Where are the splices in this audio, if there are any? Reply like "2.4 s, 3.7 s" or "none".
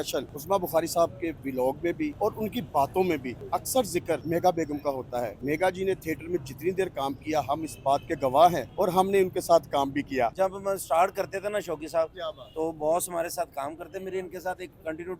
2.1 s, 3.3 s, 4.2 s, 5.4 s, 8.7 s, 10.3 s